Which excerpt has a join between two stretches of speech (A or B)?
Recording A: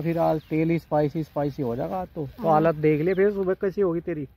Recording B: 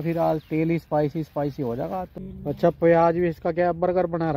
B